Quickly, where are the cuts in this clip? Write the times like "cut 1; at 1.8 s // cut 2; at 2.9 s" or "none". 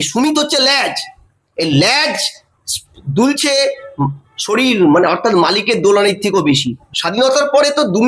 cut 1; at 6.8 s